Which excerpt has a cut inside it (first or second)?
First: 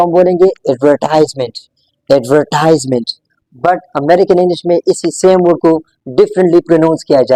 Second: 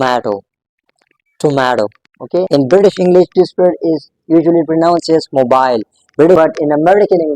second